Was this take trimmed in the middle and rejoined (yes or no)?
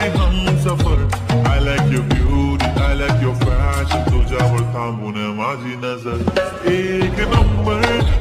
no